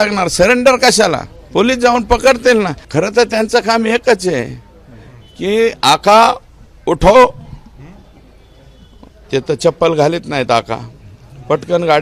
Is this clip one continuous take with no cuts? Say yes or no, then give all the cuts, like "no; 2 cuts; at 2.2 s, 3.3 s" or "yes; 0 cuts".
no; 1 cut; at 2.8 s